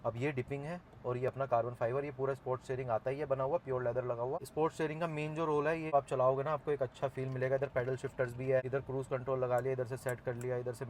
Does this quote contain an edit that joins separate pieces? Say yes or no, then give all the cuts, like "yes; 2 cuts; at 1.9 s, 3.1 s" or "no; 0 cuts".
yes; 2 cuts; at 5.9 s, 8.7 s